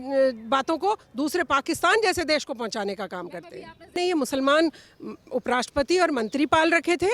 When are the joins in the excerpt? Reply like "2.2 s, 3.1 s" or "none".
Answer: 4.0 s